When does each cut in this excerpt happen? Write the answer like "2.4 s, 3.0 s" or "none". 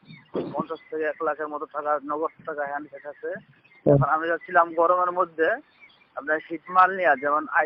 none